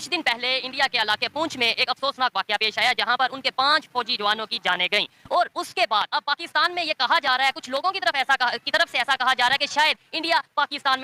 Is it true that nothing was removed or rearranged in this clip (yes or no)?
yes